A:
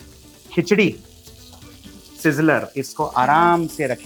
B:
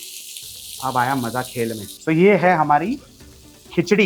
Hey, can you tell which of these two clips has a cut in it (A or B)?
B